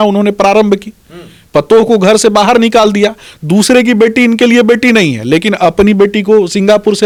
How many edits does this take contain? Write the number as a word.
zero